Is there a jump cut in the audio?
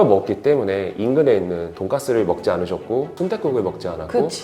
yes; 2 cuts; at 1.7 s, 3.1 s

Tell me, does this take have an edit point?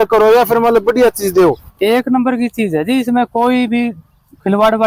no; 0 cuts

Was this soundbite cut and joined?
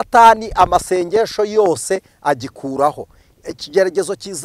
no; 0 cuts

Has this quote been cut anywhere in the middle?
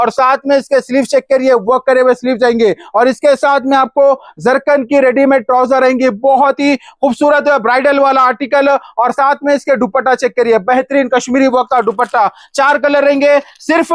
no; 0 cuts

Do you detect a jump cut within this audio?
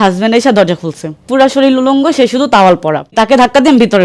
yes; 2 cuts; at 1.2 s, 3.1 s

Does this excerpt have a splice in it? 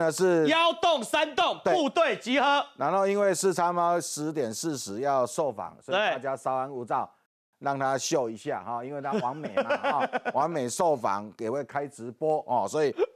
no; 0 cuts

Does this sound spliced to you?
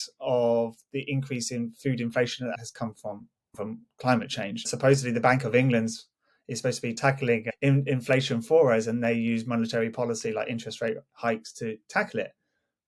yes; 3 cuts; at 2.5 s, 4.7 s, 7.0 s

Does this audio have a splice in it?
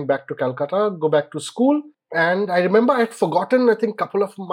yes; 1 cut; at 2.0 s

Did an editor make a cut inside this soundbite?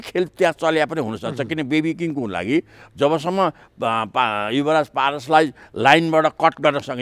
no; 0 cuts

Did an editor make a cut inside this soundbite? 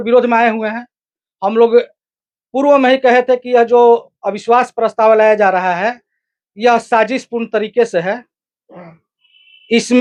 no; 0 cuts

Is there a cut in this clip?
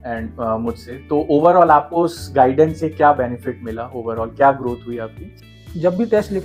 yes; 1 cut; at 5.3 s

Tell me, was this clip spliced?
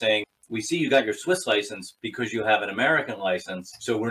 no; 0 cuts

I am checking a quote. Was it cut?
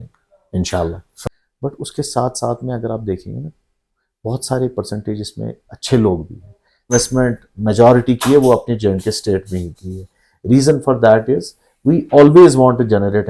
yes; 2 cuts; at 1.1 s, 6.9 s

